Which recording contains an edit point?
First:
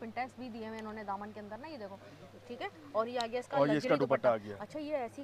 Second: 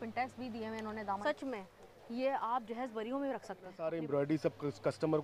second; 2 cuts; at 1.2 s, 3.8 s

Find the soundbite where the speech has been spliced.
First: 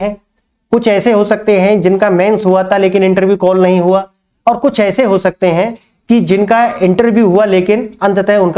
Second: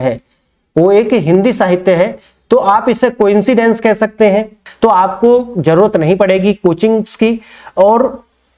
second; 1 cut; at 4.6 s

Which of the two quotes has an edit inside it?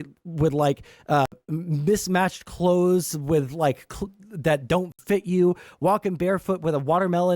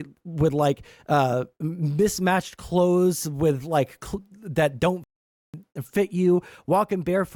first; 2 cuts; at 1.3 s, 5.0 s

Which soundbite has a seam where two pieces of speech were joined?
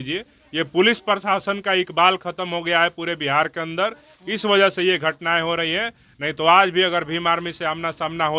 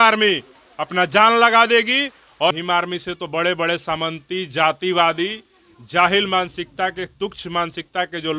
second; 1 cut; at 2.5 s

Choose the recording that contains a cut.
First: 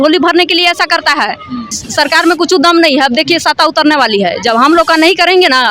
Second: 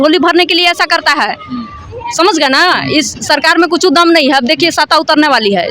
first; 1 cut; at 1.8 s

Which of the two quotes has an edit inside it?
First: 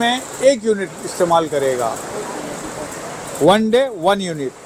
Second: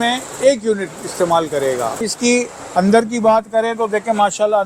second; 1 cut; at 2.0 s

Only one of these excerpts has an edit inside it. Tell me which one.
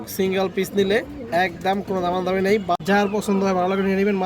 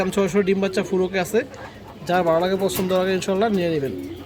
first; 1 cut; at 2.8 s

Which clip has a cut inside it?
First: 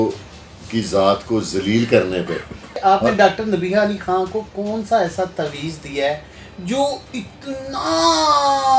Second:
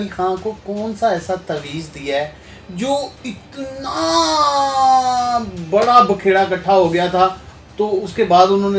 first; 1 cut; at 2.7 s

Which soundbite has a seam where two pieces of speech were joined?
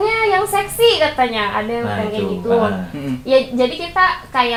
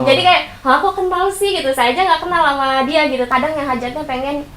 second; 1 cut; at 3.3 s

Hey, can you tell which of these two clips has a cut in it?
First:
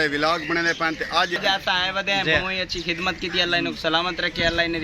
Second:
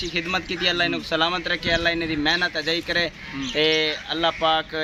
first; 1 cut; at 1.4 s

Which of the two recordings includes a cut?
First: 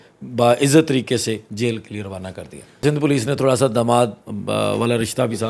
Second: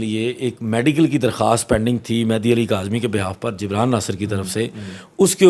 first; 1 cut; at 2.8 s

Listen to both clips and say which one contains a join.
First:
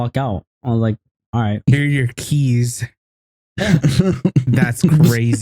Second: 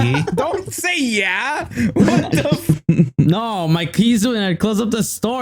first; 1 cut; at 1.7 s

